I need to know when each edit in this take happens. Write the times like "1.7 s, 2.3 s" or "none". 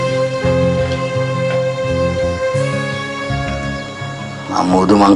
2.8 s